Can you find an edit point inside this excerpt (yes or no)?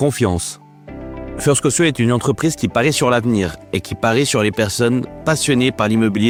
no